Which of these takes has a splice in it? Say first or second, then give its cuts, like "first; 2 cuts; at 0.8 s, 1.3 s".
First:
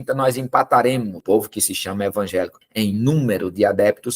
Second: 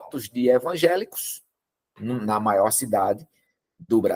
first; 2 cuts; at 1.2 s, 2.6 s